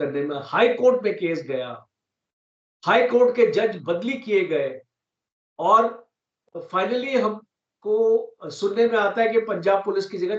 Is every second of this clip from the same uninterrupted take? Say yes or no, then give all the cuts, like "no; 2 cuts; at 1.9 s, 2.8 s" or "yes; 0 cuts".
yes; 0 cuts